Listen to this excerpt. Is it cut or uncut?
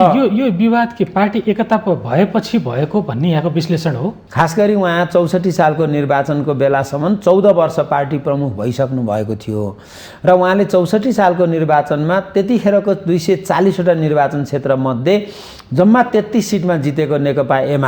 cut